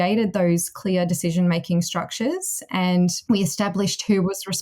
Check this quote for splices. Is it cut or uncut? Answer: cut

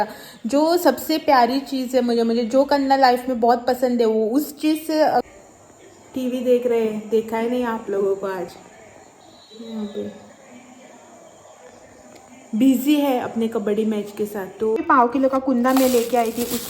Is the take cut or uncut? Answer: cut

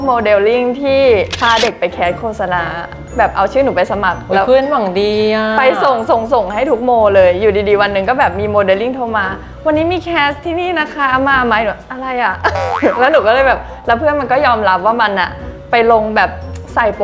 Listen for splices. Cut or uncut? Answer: uncut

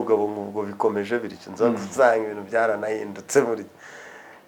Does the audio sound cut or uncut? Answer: uncut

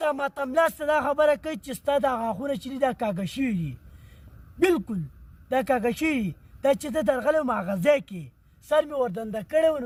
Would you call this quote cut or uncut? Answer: uncut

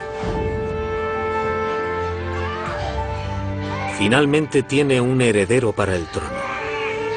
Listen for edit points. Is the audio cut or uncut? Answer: cut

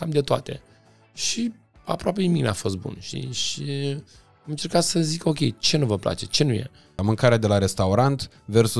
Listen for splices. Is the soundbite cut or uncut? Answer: cut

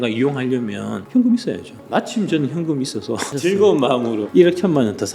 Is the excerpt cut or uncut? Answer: cut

